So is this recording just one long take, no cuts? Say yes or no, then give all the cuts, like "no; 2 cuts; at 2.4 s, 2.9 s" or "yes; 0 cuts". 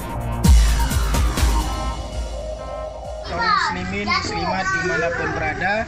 yes; 0 cuts